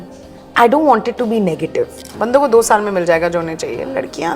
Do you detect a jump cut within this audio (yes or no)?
yes